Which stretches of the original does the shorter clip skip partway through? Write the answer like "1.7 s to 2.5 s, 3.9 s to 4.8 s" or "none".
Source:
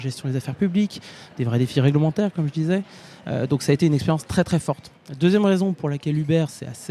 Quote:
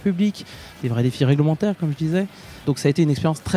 3.2 s to 3.5 s